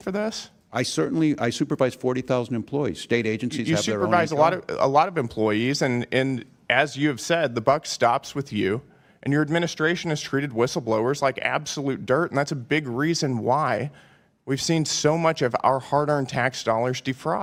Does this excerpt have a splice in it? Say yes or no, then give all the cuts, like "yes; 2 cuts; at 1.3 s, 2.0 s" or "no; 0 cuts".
no; 0 cuts